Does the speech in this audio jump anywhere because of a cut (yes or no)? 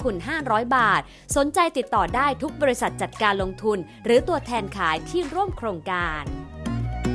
yes